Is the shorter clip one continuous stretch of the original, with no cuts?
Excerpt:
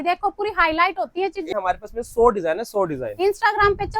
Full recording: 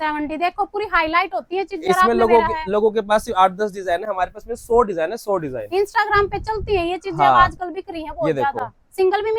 no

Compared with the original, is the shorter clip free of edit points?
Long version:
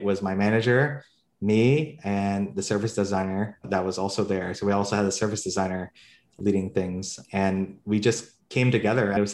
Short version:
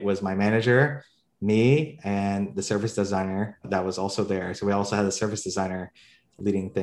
yes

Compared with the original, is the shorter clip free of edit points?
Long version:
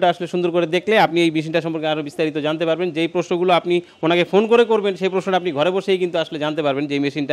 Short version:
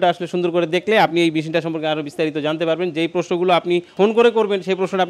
no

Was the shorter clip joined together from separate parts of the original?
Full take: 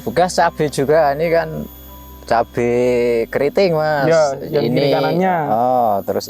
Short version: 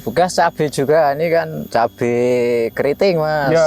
yes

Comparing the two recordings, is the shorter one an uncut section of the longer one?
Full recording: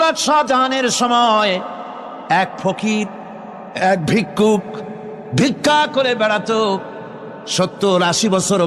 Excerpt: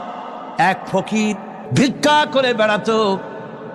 no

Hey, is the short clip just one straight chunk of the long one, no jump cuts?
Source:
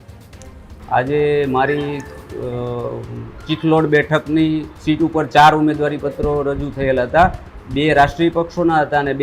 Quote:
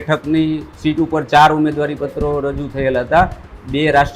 yes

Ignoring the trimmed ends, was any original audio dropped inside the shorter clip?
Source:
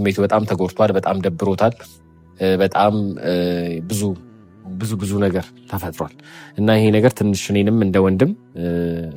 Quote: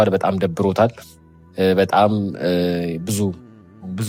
no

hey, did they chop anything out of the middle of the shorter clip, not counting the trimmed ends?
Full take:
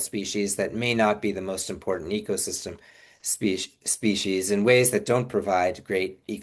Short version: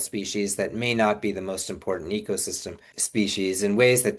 yes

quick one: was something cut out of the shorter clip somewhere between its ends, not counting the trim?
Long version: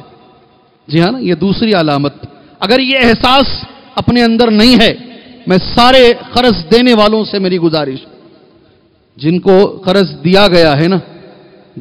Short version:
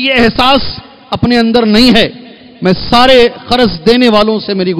no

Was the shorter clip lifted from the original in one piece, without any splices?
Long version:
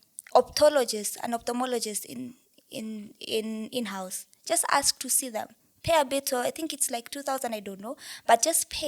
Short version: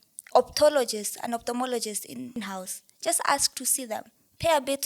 no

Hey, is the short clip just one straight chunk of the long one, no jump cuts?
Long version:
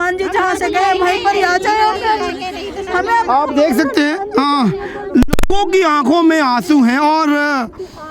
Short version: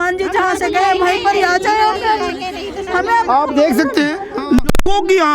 no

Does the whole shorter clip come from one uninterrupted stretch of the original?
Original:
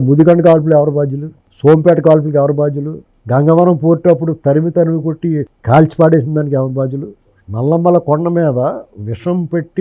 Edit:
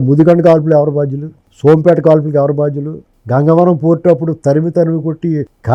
yes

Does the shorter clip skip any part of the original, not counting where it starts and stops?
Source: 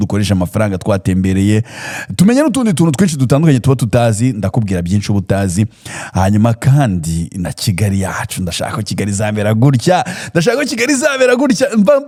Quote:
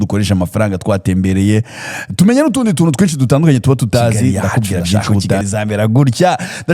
yes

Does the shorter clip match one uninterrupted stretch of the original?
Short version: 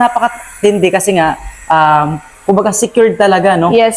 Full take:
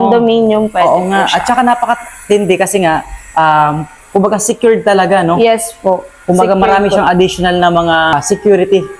yes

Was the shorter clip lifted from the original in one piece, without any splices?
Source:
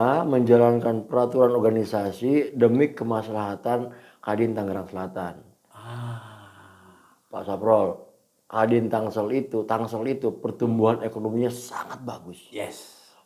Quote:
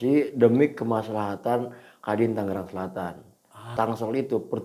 no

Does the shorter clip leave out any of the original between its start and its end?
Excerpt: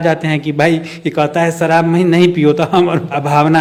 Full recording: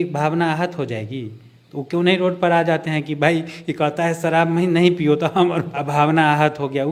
no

